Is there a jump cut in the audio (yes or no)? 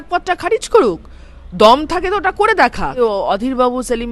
yes